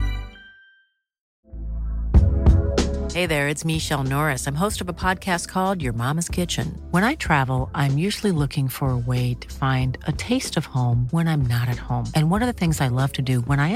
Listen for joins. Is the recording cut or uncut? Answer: cut